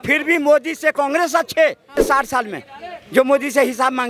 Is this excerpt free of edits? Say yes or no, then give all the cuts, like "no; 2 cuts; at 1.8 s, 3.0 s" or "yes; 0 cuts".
no; 1 cut; at 2.0 s